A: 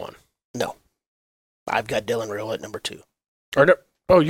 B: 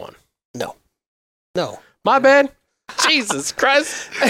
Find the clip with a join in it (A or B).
B